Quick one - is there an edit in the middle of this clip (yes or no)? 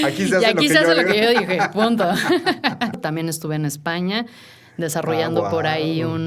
yes